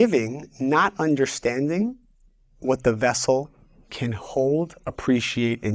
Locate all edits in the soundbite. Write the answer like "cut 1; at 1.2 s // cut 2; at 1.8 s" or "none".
none